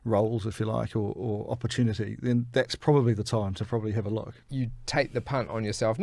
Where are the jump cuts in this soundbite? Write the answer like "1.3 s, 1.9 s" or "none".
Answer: 4.3 s